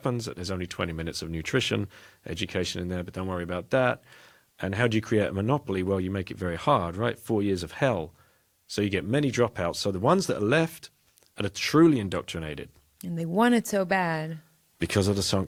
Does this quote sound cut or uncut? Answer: uncut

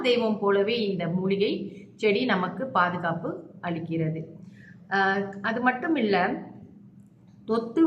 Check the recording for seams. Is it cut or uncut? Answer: uncut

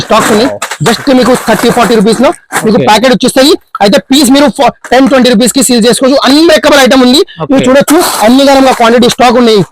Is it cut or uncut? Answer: uncut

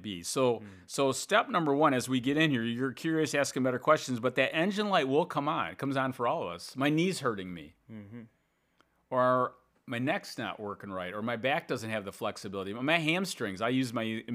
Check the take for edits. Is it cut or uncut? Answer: uncut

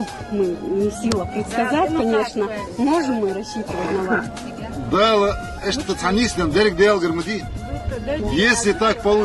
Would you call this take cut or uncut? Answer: uncut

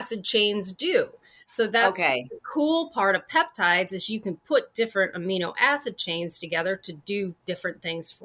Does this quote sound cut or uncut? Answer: uncut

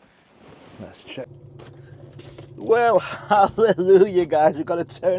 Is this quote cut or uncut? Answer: cut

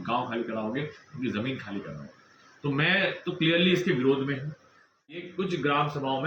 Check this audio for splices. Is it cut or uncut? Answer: cut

